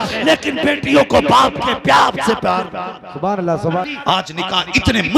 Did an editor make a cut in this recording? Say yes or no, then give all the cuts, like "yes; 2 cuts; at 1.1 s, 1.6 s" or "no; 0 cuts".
yes; 1 cut; at 3.9 s